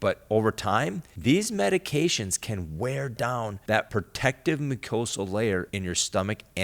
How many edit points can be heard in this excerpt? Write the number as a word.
three